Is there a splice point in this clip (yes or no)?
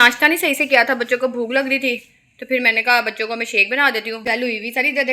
yes